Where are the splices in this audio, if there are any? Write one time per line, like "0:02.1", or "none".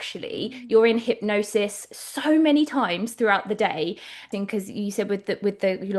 0:04.2